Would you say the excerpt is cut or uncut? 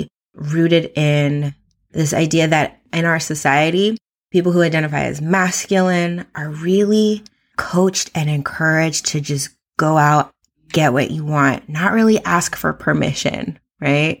cut